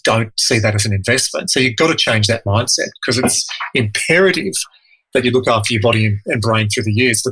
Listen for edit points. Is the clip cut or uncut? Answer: uncut